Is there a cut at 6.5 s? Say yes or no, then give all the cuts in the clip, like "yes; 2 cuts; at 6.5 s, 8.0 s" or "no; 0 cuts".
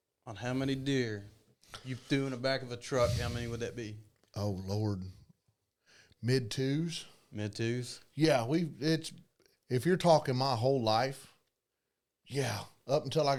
no; 0 cuts